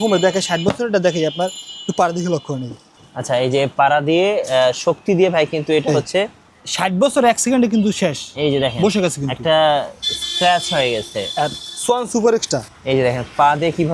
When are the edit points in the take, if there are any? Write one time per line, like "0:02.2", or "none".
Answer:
none